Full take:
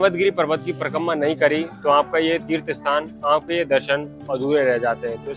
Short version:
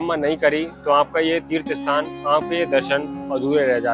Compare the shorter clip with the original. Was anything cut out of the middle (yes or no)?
no